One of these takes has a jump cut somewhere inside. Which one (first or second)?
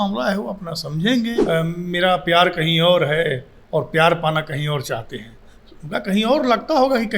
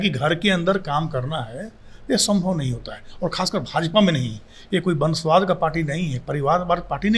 first